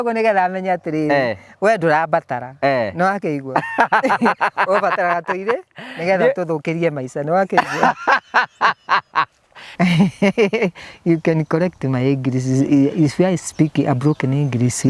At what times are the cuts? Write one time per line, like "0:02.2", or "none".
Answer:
0:09.6